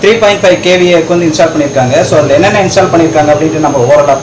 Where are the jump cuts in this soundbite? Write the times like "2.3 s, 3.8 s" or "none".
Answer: none